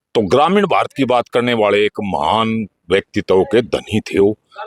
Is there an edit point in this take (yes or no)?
no